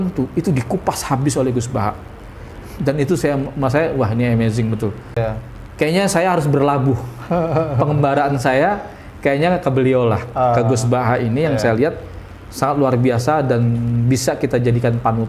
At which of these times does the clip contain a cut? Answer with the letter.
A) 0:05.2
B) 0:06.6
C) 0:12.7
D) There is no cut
A